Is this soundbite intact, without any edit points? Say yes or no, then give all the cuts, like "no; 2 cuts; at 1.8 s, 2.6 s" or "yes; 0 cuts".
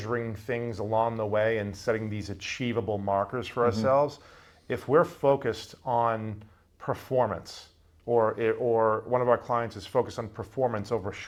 yes; 0 cuts